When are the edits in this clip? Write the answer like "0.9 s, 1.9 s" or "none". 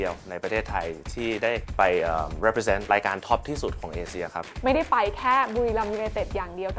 1.7 s, 2.9 s, 4.5 s